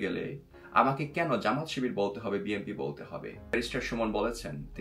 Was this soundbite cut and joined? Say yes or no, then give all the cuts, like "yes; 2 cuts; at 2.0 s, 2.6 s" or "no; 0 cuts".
yes; 1 cut; at 3.5 s